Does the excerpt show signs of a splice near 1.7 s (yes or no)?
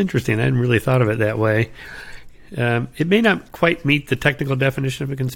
no